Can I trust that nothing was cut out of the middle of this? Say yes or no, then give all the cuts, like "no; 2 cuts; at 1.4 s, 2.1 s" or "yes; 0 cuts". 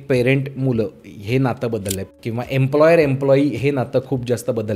no; 1 cut; at 2.1 s